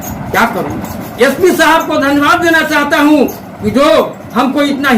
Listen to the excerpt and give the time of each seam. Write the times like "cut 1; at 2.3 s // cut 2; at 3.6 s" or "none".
cut 1; at 1.0 s